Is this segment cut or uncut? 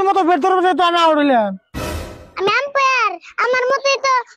uncut